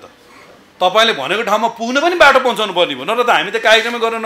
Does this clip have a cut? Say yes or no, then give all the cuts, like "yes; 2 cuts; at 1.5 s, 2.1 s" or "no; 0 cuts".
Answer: no; 0 cuts